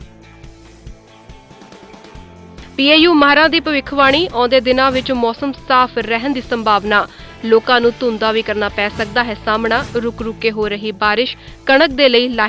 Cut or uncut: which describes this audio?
cut